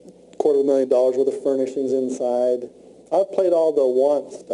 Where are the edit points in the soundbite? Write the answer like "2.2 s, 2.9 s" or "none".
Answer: 1.0 s